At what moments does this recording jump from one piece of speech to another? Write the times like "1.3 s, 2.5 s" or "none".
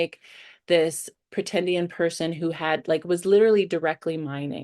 1.2 s